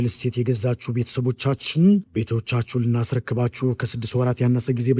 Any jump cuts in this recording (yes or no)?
no